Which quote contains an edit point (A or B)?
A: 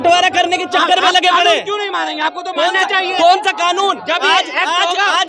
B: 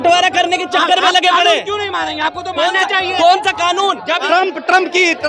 B